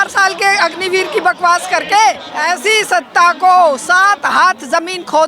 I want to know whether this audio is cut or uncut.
cut